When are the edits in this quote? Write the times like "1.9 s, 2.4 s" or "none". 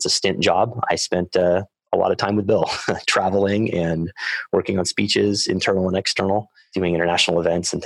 6.6 s